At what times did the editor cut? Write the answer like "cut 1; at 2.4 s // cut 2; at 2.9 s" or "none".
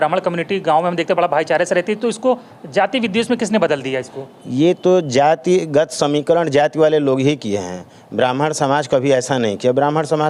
none

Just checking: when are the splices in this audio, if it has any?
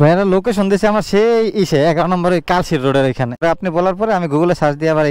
cut 1; at 3.4 s

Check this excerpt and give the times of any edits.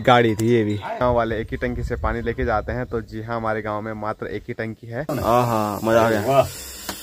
cut 1; at 1.0 s // cut 2; at 5.1 s

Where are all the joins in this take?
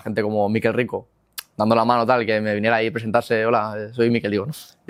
none

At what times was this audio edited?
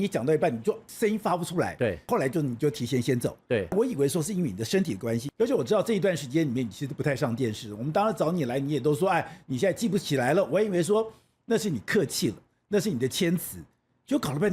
cut 1; at 0.9 s // cut 2; at 2.0 s // cut 3; at 3.7 s // cut 4; at 5.3 s

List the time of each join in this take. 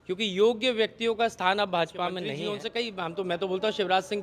cut 1; at 2.4 s

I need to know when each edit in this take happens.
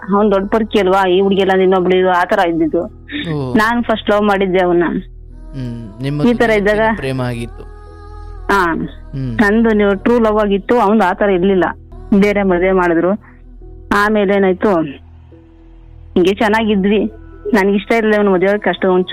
cut 1; at 11.9 s

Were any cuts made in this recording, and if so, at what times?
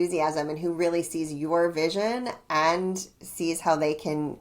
none

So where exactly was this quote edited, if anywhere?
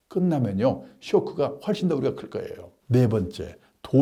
none

